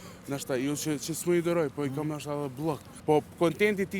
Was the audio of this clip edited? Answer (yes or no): yes